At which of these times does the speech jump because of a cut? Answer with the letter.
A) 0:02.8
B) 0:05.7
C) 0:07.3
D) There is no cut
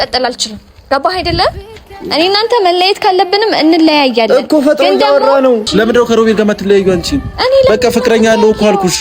B